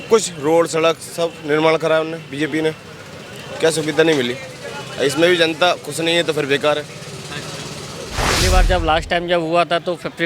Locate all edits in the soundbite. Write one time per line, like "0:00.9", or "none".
0:08.4